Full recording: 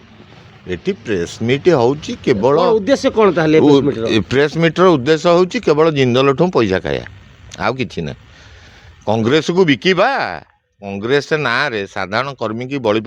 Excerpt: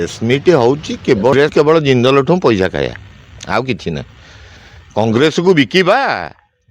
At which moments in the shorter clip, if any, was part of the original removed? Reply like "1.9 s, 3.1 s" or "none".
1.4 s